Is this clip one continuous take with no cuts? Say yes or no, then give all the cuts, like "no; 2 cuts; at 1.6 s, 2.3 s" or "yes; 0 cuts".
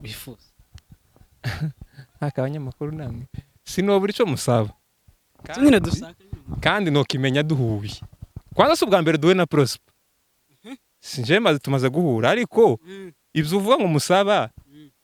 yes; 0 cuts